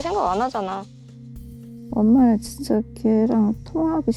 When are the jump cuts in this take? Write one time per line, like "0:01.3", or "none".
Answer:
none